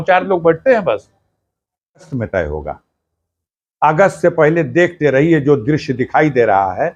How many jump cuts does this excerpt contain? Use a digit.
1